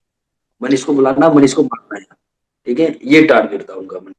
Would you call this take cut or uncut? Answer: uncut